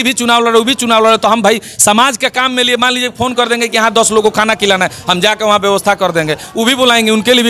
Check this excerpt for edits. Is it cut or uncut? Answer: uncut